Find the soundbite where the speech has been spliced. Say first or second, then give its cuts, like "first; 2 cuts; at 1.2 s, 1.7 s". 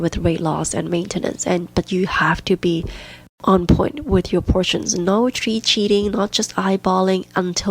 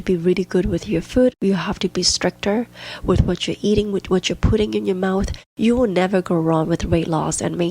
second; 1 cut; at 5.5 s